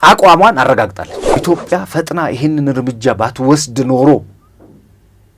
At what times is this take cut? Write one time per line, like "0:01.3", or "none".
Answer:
0:01.2